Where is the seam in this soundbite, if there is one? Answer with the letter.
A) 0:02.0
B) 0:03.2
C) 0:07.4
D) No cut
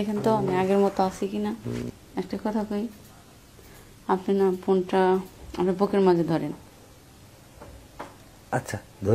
A